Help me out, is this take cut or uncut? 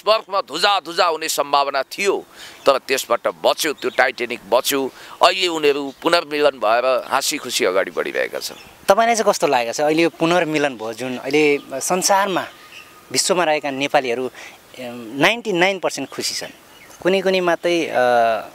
uncut